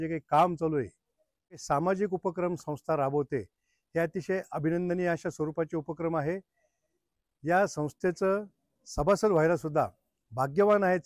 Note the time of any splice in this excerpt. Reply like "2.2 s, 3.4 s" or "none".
1.6 s

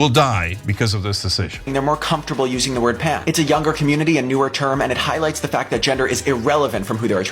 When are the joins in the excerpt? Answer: 1.7 s

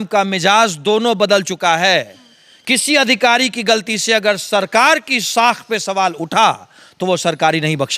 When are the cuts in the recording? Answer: none

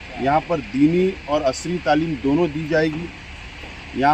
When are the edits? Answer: none

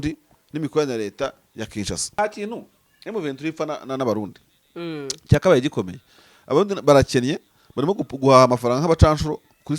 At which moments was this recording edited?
2.2 s

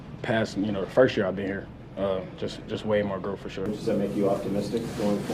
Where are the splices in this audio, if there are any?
3.7 s

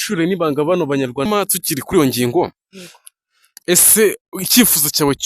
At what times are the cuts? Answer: 1.3 s

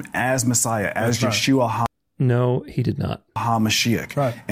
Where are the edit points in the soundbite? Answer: none

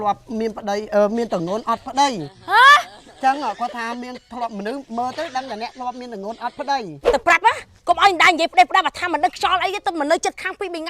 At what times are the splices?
7.0 s

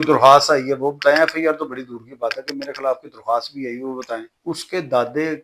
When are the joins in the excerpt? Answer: 4.3 s

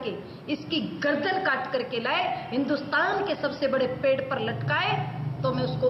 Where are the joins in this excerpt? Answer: 4.3 s

